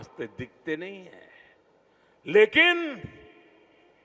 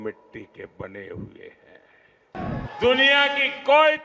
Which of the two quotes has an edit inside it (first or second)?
second